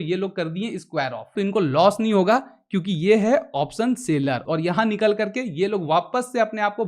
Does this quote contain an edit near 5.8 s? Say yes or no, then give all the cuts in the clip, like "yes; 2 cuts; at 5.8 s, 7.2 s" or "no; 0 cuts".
no; 2 cuts; at 1.3 s, 4.4 s